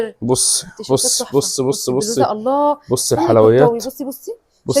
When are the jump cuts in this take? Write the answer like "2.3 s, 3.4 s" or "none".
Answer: none